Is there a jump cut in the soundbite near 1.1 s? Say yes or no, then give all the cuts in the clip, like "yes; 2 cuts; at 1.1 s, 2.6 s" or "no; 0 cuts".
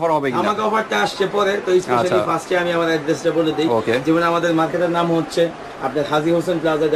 no; 0 cuts